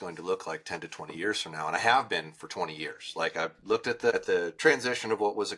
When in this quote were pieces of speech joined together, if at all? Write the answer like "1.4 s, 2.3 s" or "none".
4.1 s